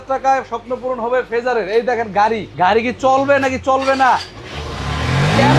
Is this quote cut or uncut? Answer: cut